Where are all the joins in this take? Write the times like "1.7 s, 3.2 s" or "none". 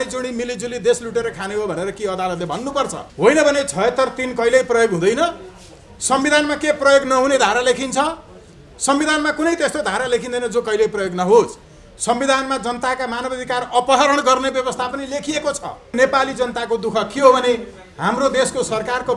15.9 s